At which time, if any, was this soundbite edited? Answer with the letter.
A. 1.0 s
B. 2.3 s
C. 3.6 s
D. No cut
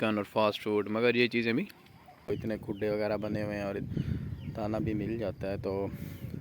B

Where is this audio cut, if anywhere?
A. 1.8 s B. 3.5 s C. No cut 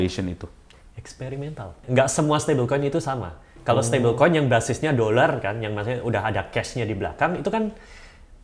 A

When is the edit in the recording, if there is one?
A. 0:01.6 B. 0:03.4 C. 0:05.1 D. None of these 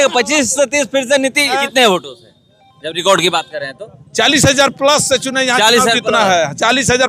A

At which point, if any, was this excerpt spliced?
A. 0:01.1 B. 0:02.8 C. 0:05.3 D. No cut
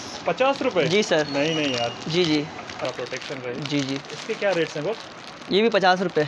B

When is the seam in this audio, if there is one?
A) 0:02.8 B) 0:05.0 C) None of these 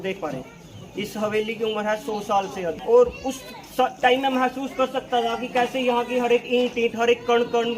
A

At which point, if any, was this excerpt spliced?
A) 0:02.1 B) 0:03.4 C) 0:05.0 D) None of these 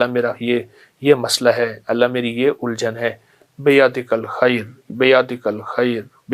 D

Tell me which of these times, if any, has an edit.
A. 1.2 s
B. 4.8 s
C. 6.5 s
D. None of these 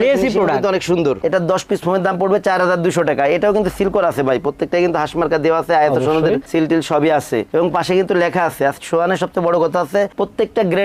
A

